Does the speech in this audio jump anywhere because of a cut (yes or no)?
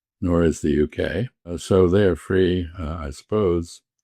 yes